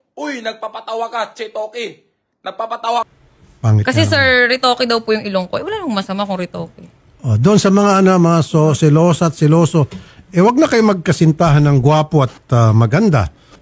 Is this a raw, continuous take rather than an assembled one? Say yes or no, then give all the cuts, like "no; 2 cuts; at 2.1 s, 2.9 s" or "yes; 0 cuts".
no; 1 cut; at 3.1 s